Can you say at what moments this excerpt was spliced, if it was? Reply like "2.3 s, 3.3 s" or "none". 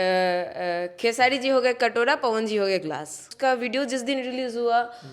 3.3 s